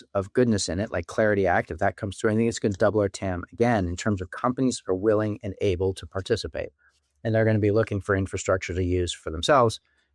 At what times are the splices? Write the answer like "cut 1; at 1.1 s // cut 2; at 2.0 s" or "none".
none